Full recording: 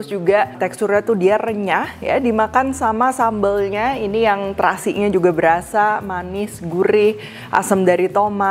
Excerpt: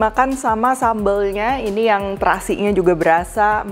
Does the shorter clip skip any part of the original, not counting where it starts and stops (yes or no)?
no